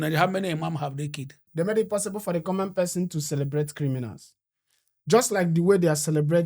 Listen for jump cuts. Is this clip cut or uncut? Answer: cut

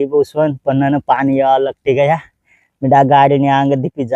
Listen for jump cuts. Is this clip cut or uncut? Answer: uncut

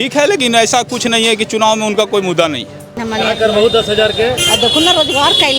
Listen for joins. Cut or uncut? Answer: cut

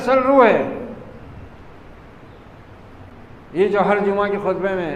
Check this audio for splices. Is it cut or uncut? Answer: uncut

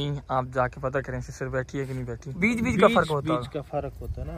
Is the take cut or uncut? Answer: cut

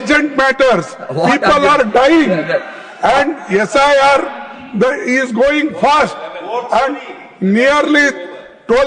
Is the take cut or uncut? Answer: uncut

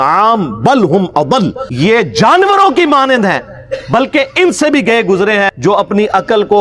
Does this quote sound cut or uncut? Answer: cut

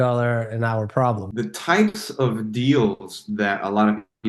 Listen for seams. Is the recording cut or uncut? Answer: cut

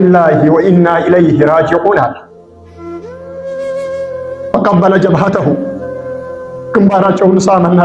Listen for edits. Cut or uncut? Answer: uncut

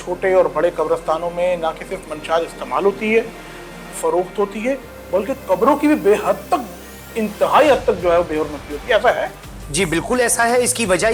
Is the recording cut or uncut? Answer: uncut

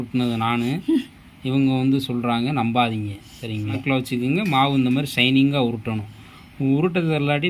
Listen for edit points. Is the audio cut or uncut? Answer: cut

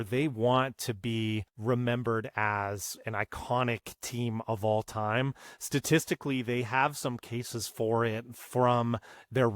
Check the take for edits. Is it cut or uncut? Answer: cut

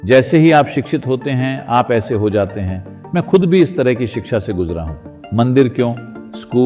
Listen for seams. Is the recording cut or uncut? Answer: uncut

